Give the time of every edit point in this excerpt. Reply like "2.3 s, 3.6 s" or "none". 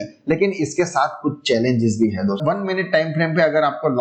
2.4 s